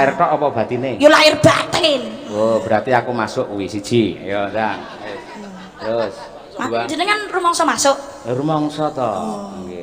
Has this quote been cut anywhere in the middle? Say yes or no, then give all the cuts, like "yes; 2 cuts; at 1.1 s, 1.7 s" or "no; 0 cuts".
no; 0 cuts